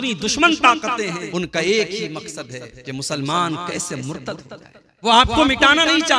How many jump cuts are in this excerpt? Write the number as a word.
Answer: two